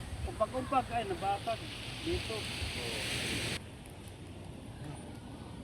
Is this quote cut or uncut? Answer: cut